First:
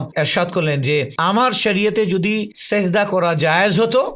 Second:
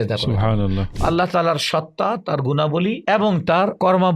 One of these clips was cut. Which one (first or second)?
second